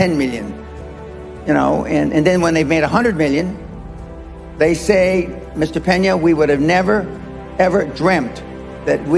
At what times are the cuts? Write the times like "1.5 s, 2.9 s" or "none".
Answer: none